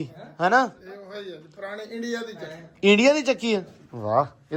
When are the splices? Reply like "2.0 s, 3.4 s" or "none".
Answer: none